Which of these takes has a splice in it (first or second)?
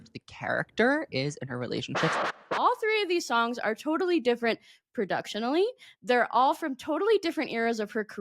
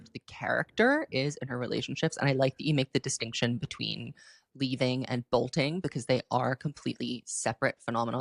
first